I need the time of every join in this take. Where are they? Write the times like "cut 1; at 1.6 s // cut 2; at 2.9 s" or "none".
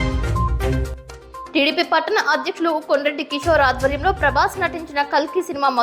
cut 1; at 0.9 s